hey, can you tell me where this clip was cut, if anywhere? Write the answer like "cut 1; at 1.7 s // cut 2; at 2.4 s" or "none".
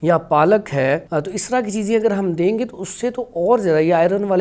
cut 1; at 1.0 s